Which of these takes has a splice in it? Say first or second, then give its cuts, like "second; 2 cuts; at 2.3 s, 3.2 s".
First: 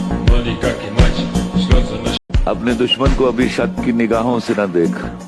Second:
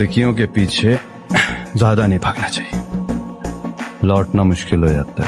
first; 1 cut; at 2.3 s